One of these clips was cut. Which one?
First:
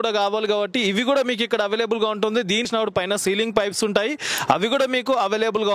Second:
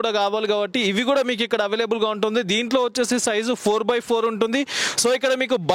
first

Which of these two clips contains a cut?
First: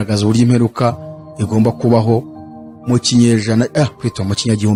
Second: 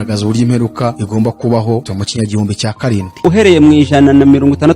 second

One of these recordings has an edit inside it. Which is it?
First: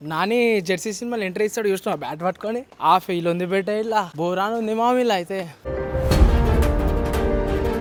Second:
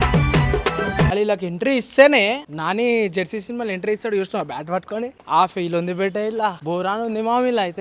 second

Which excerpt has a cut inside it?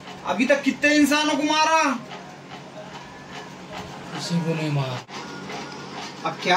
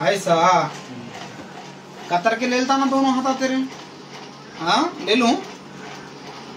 first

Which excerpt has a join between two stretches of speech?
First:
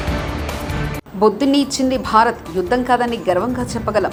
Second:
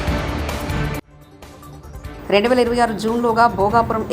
second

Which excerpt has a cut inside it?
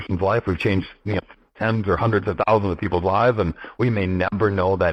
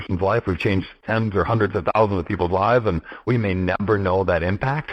second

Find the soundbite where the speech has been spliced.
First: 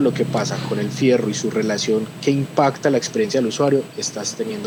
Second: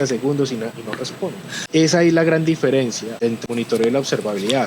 second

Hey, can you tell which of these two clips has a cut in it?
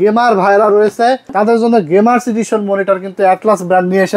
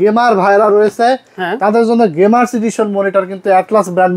first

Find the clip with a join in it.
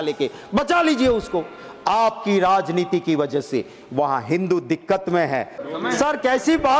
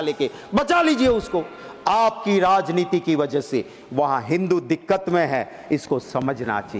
first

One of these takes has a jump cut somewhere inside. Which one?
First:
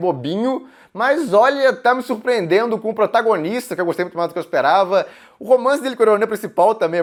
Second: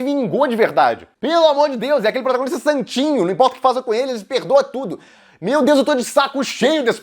second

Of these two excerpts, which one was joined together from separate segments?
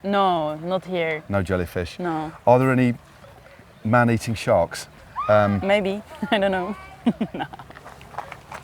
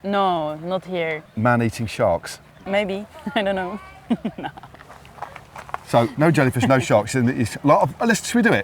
second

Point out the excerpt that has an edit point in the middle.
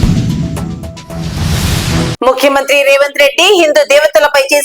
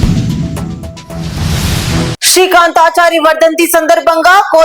second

